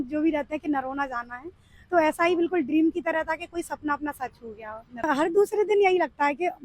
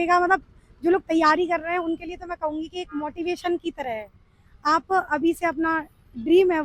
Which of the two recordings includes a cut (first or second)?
first